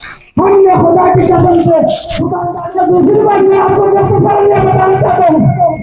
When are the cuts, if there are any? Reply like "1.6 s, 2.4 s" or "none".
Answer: 2.4 s